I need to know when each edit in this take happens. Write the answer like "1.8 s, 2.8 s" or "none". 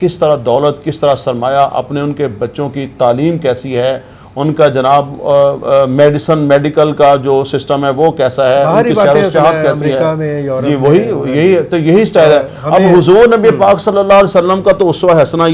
none

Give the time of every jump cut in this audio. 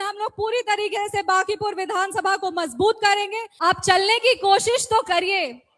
3.4 s

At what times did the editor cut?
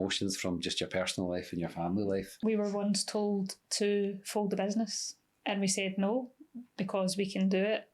2.3 s, 5.3 s

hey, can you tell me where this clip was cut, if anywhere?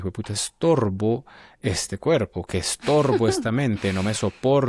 none

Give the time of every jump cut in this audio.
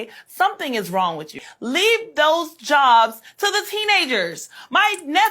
1.4 s

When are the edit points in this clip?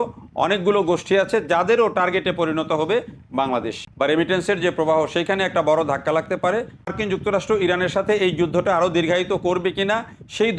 4.1 s, 6.9 s

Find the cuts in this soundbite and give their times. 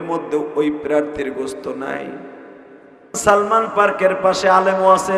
3.2 s

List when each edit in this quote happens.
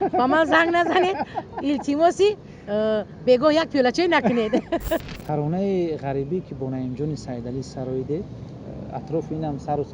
5.0 s

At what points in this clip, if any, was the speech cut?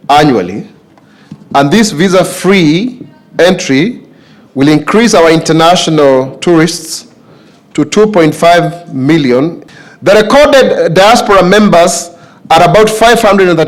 9.6 s

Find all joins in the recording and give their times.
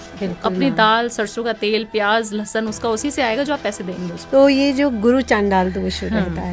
4.2 s

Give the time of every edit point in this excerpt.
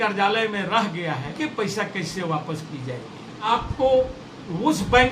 1.3 s, 3.5 s

